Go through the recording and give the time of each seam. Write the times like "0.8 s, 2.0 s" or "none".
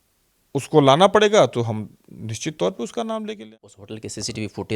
3.6 s